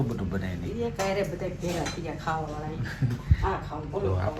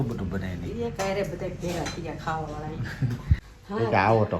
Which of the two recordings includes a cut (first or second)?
second